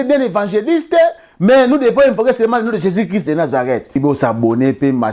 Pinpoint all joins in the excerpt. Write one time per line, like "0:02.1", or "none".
0:04.0

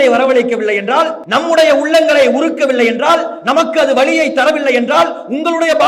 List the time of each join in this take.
0:01.2

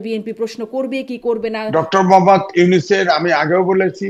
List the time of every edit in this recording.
0:01.7

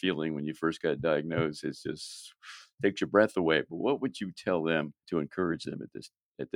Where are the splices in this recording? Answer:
0:05.0

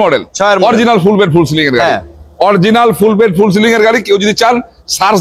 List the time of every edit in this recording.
none

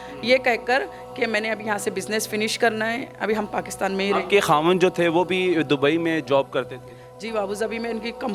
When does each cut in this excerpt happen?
none

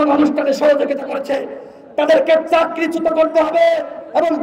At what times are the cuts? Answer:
none

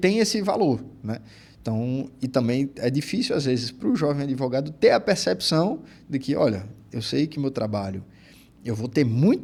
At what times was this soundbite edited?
none

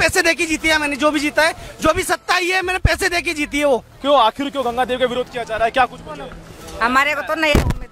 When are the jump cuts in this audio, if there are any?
0:03.9

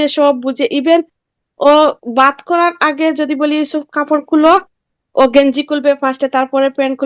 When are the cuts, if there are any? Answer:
none

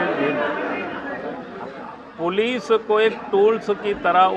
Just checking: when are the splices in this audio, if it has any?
none

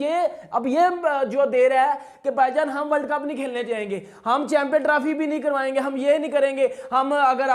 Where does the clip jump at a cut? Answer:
none

